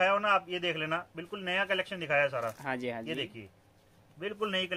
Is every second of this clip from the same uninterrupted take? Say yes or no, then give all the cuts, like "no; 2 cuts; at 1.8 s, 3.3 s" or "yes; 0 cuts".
yes; 0 cuts